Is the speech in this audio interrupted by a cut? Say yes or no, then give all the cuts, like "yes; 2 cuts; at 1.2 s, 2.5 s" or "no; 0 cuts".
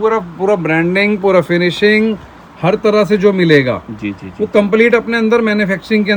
no; 0 cuts